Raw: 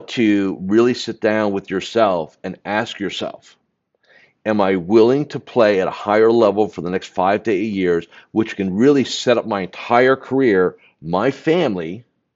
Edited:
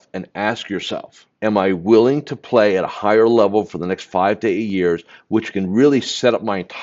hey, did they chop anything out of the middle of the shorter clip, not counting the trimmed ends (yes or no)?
yes